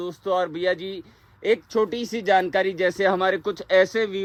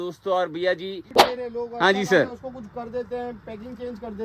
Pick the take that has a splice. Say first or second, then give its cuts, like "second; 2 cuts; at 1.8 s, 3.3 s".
second; 1 cut; at 1.1 s